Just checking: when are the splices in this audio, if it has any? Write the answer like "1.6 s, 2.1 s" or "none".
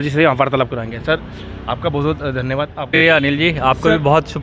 2.9 s